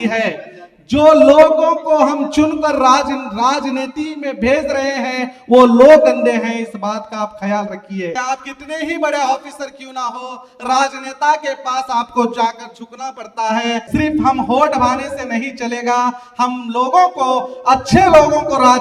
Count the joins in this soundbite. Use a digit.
2